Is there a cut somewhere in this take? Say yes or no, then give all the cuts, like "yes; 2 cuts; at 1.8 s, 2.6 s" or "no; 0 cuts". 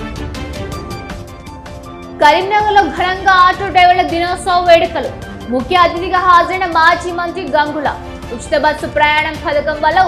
no; 0 cuts